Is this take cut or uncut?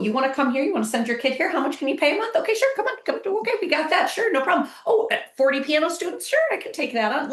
uncut